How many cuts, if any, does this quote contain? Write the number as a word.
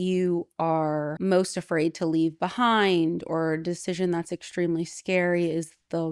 one